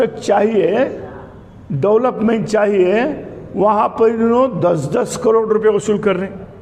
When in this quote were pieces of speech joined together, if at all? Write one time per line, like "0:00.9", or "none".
none